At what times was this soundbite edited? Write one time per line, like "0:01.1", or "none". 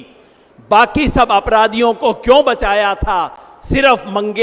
none